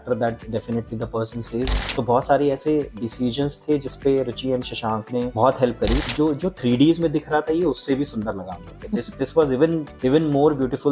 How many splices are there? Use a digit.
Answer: 2